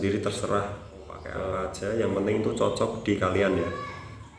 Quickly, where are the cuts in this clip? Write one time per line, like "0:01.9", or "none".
0:01.5